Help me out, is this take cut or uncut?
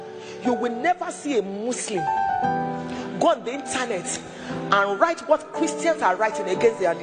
uncut